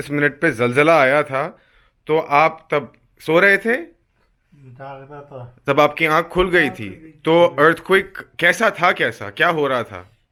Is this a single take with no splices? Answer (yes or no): yes